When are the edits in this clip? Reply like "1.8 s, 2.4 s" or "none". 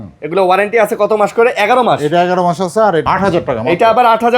3.0 s